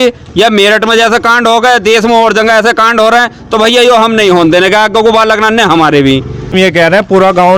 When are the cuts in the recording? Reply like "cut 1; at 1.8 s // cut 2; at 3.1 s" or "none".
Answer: cut 1; at 6.5 s